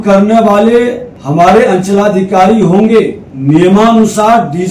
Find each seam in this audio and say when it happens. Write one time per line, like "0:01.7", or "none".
0:01.1
0:03.3